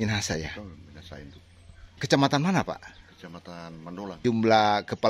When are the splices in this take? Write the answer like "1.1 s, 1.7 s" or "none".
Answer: 2.0 s, 4.2 s